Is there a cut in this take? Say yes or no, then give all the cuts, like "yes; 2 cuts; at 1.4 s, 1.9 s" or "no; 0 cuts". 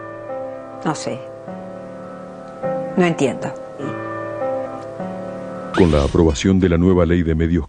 no; 0 cuts